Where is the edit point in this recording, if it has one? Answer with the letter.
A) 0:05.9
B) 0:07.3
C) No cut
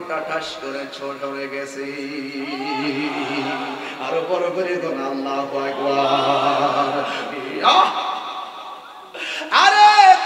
B